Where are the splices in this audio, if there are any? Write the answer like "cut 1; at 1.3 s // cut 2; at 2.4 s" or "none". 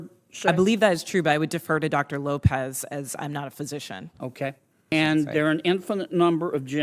cut 1; at 4.9 s